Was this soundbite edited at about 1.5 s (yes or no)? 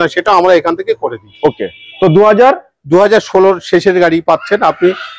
no